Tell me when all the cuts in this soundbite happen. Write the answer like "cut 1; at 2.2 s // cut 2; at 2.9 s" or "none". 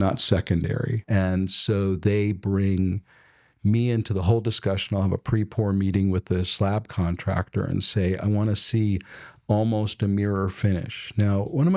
cut 1; at 1.0 s